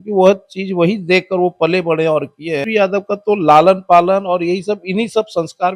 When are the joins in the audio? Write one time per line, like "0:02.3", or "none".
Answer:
0:02.6